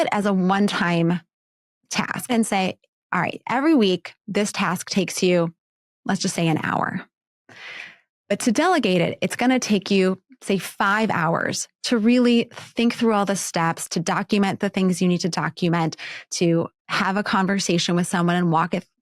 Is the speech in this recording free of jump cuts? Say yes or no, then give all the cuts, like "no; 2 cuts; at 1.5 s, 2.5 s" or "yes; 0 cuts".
no; 1 cut; at 2.3 s